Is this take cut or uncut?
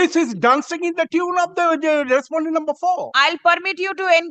uncut